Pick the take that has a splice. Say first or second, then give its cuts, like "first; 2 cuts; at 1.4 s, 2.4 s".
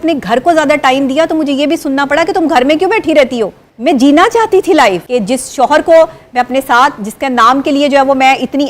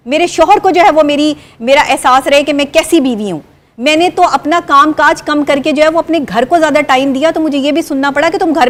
first; 2 cuts; at 3.7 s, 5.0 s